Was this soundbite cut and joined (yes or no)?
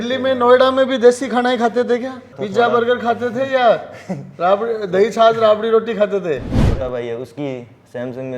yes